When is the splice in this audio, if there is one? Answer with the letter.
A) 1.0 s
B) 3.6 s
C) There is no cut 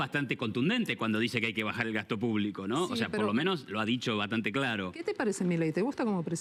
C